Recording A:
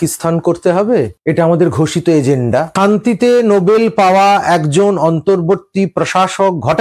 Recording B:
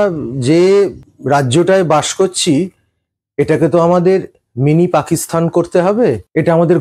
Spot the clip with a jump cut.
A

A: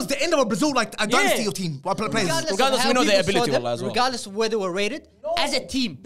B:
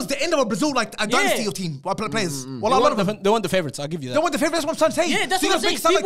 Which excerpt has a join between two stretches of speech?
A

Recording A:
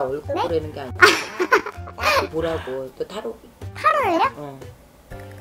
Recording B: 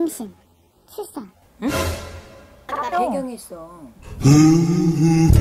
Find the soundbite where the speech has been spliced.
B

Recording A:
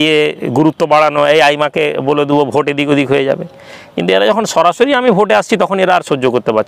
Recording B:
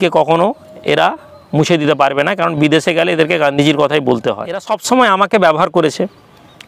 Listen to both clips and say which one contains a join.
B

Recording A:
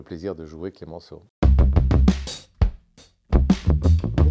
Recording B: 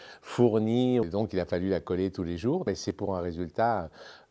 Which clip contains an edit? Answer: B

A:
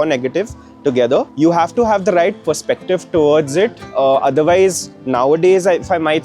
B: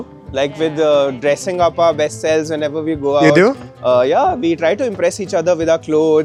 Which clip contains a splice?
A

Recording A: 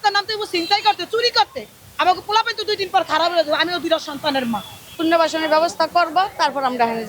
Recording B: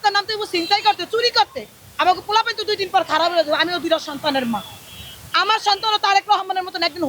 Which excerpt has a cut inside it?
A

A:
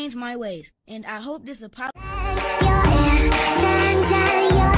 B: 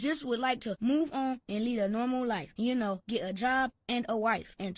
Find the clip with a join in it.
A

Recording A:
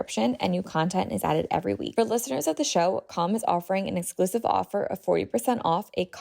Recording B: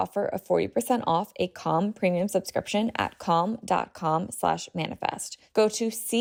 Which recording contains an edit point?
A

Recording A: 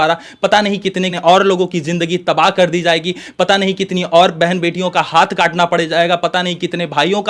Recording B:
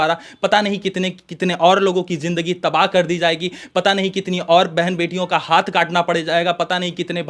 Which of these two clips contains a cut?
A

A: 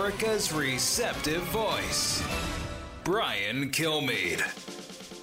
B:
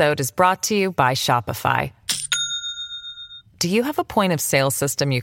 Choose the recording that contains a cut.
A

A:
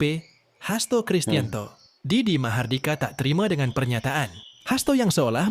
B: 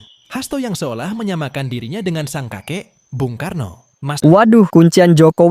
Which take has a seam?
B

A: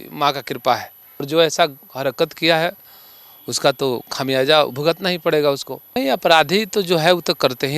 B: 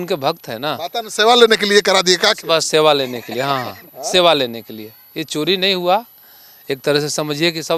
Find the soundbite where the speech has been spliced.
A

